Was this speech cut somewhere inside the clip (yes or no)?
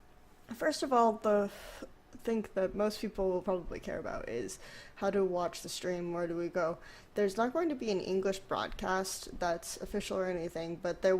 yes